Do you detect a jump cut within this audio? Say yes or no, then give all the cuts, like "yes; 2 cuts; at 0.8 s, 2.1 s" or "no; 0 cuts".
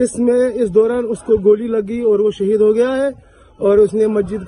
no; 0 cuts